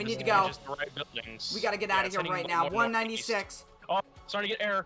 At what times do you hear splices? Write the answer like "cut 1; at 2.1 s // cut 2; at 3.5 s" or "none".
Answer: none

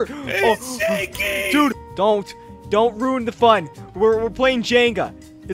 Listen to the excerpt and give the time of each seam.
cut 1; at 1.8 s

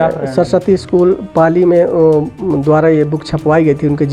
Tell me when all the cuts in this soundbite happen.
none

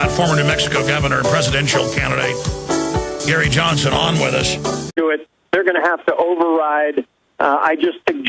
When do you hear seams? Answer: none

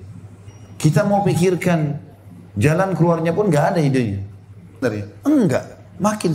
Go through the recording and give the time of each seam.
cut 1; at 4.8 s

